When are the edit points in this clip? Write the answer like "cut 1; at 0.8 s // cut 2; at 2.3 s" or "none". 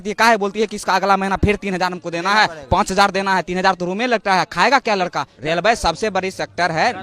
cut 1; at 5.3 s